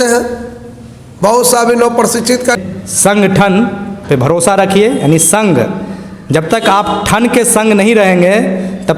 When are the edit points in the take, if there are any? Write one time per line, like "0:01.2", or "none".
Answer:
0:02.6